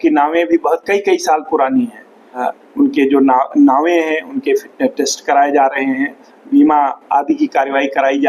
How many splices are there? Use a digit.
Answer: 1